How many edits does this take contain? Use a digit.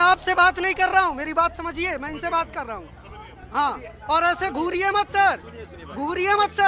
0